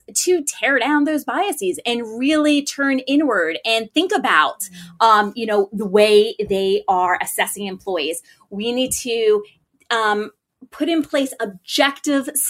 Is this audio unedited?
yes; 0 cuts

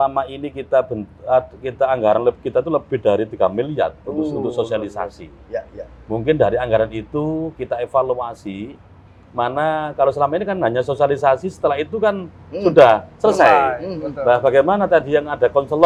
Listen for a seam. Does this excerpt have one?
no; 0 cuts

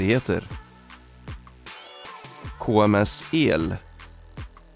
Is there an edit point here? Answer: yes; 1 cut; at 3.8 s

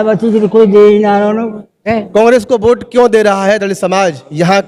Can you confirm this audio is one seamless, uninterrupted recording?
no; 1 cut; at 1.9 s

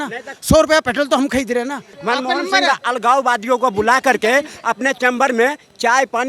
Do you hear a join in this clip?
yes; 1 cut; at 1.9 s

